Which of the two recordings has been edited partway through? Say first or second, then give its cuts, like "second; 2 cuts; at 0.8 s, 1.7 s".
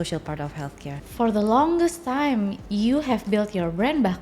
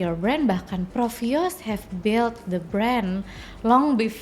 first; 2 cuts; at 1.0 s, 2.6 s